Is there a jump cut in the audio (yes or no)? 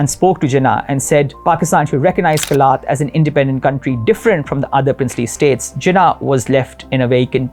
no